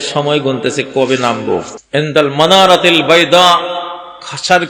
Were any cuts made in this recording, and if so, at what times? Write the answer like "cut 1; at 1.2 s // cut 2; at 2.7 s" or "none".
cut 1; at 1.8 s